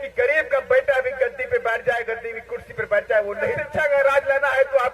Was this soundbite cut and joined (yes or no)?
yes